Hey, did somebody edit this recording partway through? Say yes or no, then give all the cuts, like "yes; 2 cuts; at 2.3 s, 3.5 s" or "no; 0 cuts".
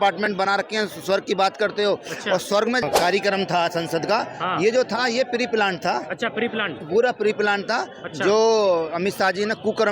yes; 1 cut; at 2.8 s